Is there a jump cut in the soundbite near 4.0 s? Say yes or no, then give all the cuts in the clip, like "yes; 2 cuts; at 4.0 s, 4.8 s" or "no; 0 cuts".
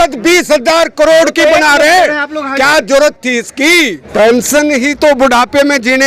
yes; 1 cut; at 4.0 s